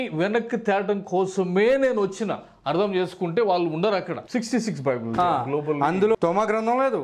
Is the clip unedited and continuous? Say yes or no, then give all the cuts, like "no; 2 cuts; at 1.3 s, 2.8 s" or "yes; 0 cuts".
no; 1 cut; at 4.2 s